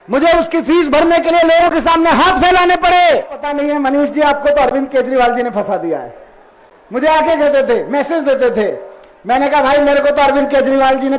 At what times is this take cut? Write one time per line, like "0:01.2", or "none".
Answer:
0:03.4